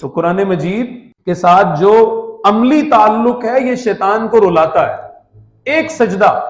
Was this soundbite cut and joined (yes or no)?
yes